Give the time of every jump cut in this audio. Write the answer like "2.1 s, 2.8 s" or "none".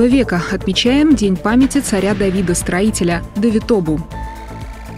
4.0 s